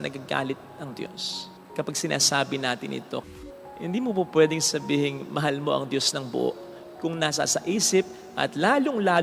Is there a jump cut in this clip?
yes; 1 cut; at 3.2 s

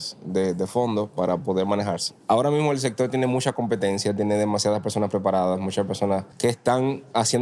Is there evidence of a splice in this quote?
yes; 2 cuts; at 2.1 s, 6.3 s

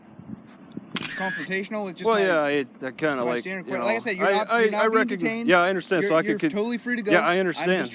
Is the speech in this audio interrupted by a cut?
no; 0 cuts

